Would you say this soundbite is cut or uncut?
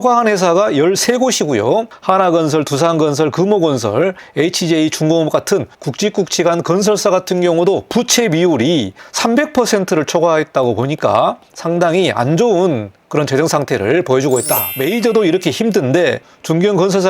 cut